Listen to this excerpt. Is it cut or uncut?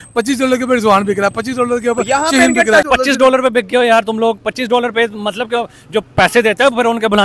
cut